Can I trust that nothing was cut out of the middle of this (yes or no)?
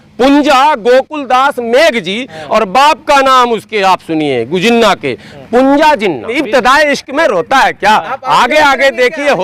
no